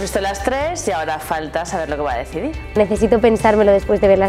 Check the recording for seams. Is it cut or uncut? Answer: cut